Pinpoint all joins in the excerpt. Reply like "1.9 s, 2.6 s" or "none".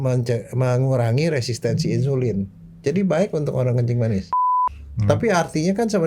4.4 s